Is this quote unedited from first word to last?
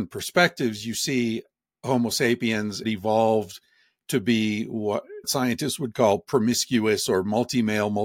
no; 2 cuts; at 2.8 s, 5.3 s

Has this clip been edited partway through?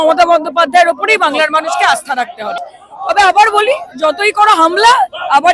yes; 1 cut; at 2.6 s

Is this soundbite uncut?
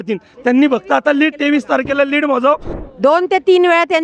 no; 1 cut; at 2.8 s

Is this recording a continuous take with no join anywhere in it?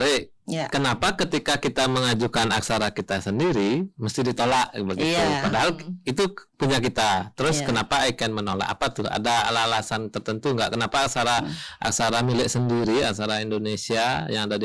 yes; 0 cuts

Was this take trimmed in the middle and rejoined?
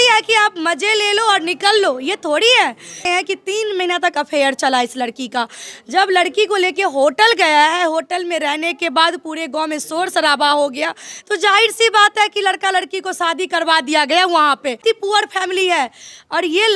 yes; 2 cuts; at 3.0 s, 14.8 s

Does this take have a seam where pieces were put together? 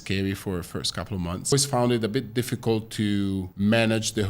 yes; 2 cuts; at 1.5 s, 3.5 s

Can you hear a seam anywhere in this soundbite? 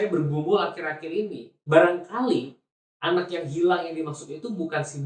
no; 0 cuts

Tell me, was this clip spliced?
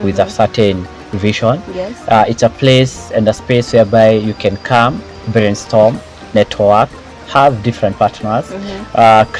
no; 0 cuts

